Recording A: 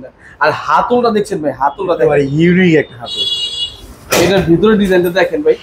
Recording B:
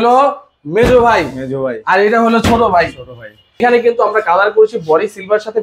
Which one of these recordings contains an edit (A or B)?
B